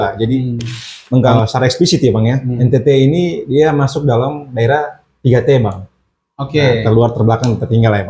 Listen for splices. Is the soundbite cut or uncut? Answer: cut